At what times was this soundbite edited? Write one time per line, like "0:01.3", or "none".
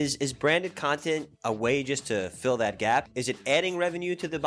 0:01.3
0:03.1